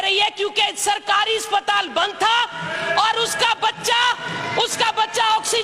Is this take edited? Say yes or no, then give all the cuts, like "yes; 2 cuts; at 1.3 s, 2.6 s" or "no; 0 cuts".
no; 0 cuts